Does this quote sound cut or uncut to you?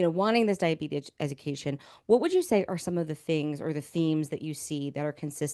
uncut